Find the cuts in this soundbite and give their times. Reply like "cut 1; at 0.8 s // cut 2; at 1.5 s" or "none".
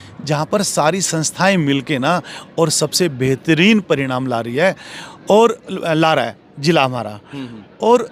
none